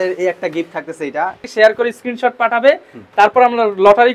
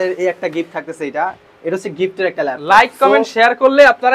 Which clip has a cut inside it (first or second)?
first